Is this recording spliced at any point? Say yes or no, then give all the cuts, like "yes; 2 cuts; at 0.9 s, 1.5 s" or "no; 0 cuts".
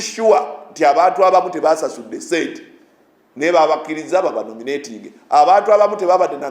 no; 0 cuts